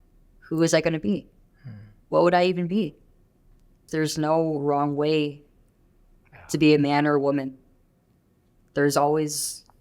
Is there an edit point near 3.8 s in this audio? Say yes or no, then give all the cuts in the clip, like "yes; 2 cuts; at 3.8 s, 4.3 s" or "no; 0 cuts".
yes; 1 cut; at 3.8 s